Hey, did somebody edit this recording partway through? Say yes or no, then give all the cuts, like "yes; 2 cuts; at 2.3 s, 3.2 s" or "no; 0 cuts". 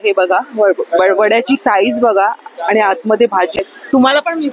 yes; 1 cut; at 3.6 s